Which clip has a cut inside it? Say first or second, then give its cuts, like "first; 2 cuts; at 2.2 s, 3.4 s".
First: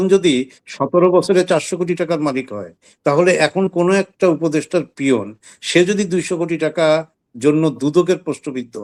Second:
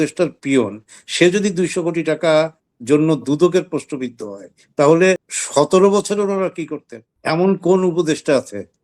second; 1 cut; at 5.3 s